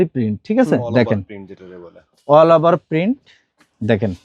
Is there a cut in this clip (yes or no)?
no